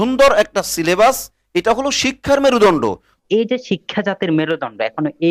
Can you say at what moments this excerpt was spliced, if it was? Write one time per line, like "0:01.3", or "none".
0:03.1

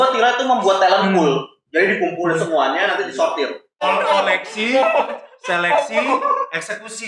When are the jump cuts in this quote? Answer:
0:03.8

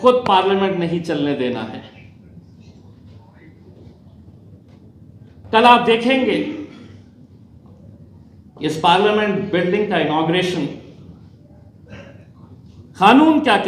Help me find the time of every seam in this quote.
0:03.8

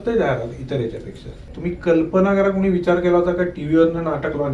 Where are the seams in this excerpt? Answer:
0:01.5

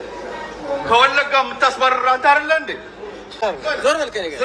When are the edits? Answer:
0:03.4

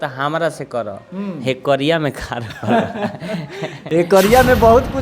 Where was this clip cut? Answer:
none

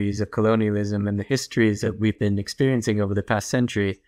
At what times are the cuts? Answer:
0:01.9

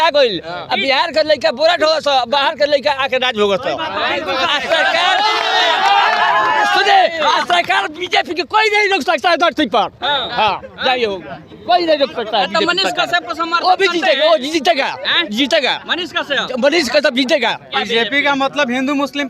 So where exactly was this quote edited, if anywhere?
0:17.7

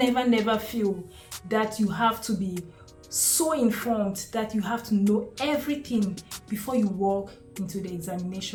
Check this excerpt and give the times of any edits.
none

